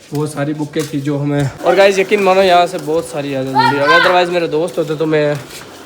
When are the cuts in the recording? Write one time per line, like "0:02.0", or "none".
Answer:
0:01.5